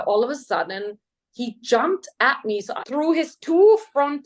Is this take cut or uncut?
cut